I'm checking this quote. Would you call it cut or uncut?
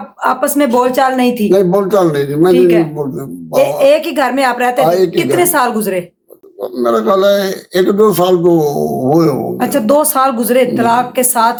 uncut